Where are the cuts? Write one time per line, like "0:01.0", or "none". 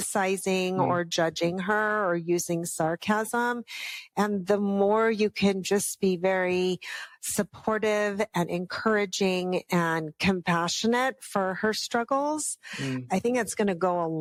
none